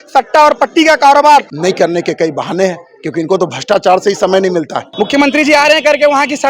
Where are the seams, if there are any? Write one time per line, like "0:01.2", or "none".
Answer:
0:01.5
0:04.8